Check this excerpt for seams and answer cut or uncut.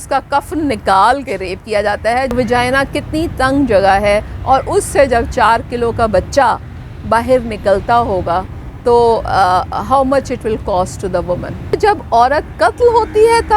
cut